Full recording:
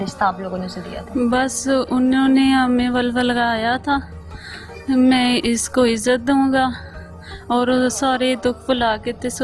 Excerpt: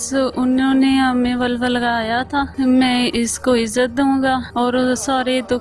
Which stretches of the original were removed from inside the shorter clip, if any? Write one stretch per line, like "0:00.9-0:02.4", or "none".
0:04.1-0:04.8
0:06.8-0:07.4